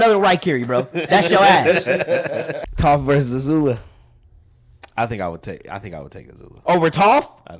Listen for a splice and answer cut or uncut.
cut